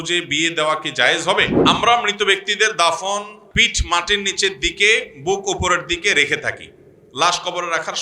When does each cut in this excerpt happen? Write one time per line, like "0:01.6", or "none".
0:01.5